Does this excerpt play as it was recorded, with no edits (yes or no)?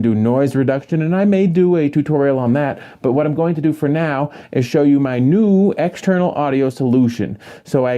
no